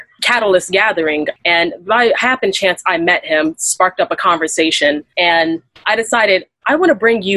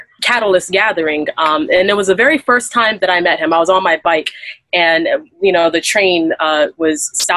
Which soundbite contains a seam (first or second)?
first